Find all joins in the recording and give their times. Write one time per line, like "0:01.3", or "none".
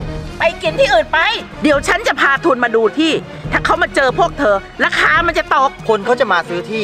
0:01.5
0:05.8

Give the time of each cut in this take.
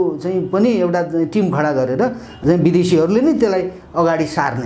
0:02.4

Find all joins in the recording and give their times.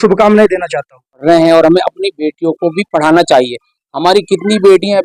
0:01.2

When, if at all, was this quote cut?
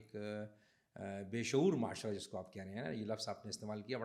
none

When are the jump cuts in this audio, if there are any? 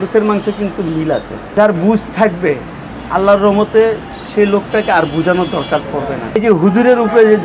0:01.4
0:06.4

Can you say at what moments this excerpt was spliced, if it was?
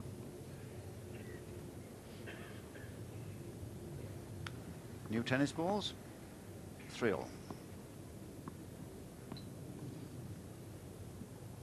none

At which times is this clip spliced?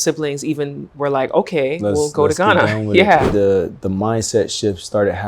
0:03.3

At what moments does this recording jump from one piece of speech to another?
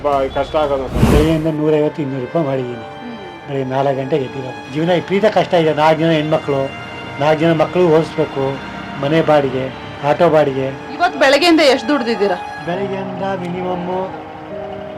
0:01.0
0:04.6
0:10.8

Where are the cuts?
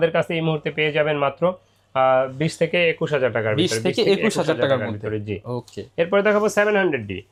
none

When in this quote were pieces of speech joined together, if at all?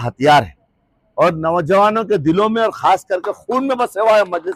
none

